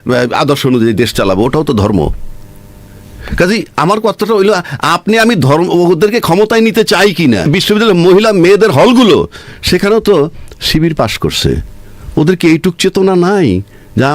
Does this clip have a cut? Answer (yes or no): yes